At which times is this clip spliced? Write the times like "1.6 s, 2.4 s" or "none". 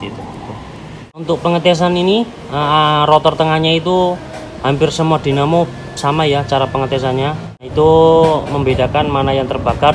1.2 s, 7.7 s